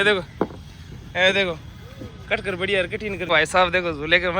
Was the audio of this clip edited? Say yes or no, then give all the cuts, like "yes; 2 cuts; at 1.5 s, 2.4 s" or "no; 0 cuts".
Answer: yes; 1 cut; at 3.3 s